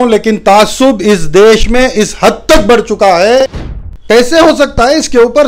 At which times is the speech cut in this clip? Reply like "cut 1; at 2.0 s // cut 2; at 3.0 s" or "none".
cut 1; at 3.6 s